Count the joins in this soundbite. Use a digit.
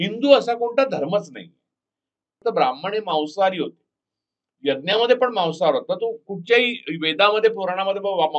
1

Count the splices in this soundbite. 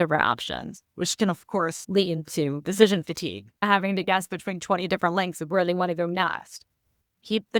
2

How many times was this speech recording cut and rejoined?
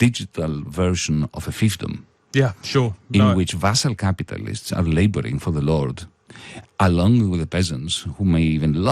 1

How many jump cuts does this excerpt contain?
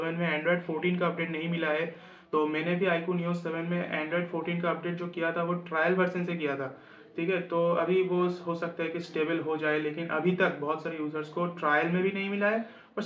0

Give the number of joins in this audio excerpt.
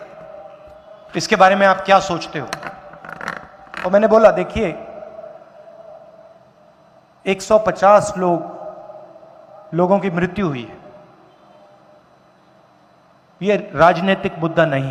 0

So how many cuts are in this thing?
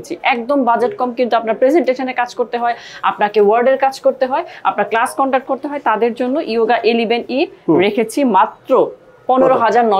0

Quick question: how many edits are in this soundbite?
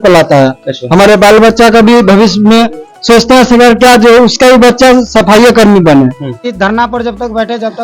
1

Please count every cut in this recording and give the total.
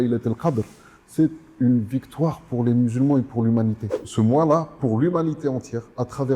1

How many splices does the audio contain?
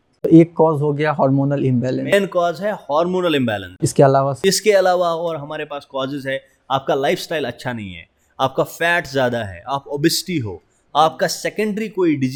0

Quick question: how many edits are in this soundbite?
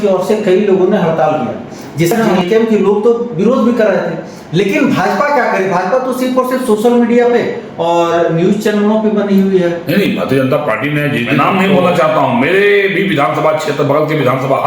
2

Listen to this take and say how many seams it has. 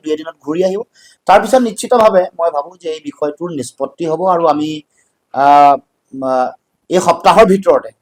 0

